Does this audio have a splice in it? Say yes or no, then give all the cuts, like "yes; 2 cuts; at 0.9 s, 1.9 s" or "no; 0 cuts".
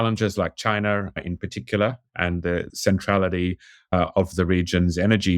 no; 0 cuts